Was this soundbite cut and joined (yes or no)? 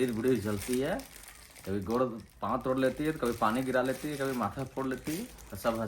no